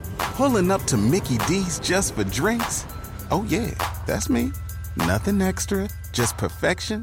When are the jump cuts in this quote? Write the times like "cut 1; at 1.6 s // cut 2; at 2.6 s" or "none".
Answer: none